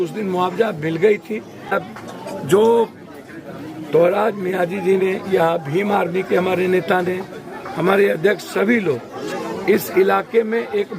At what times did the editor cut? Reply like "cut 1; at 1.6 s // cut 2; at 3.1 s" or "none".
cut 1; at 1.7 s